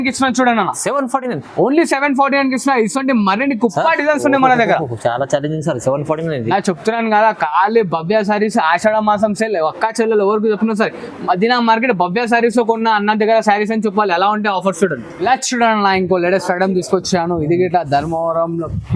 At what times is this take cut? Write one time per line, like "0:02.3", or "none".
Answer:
none